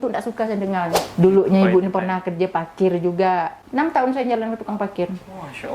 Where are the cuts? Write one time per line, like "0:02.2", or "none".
0:01.0
0:03.6